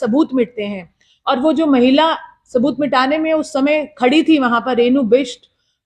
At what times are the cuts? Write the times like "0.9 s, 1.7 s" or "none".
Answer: none